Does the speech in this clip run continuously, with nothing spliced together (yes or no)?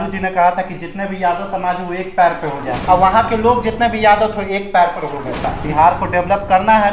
no